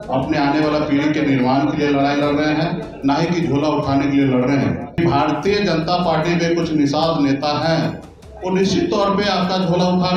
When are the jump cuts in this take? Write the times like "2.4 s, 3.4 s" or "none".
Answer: 5.0 s